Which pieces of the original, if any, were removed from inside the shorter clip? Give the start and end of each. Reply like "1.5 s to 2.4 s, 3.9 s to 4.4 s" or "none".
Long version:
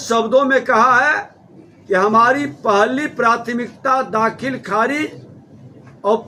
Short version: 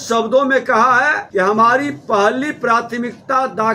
1.2 s to 1.8 s